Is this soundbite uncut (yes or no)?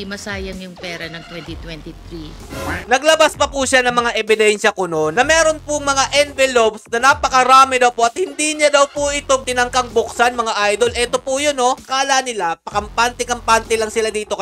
no